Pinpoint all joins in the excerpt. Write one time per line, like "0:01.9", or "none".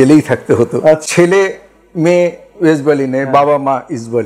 0:01.0